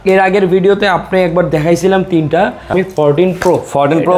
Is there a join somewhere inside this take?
yes; 1 cut; at 2.7 s

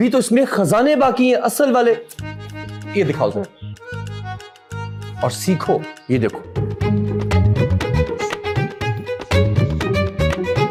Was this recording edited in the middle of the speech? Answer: no; 0 cuts

